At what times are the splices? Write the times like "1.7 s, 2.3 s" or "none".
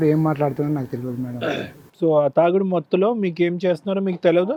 none